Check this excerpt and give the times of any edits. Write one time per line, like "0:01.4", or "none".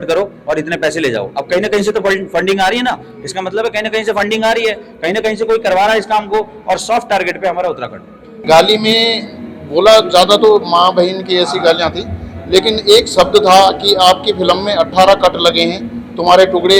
0:08.3